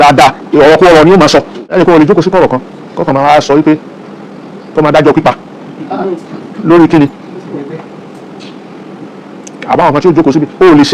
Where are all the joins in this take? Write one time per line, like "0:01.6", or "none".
0:01.6